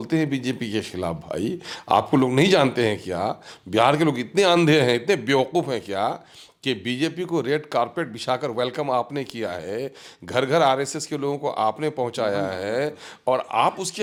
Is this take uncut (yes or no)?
yes